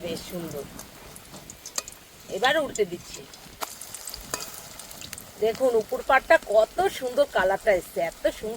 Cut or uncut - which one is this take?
cut